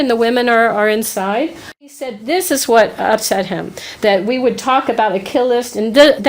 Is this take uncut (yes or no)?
no